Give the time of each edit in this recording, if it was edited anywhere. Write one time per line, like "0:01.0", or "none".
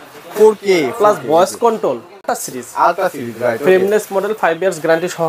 0:02.3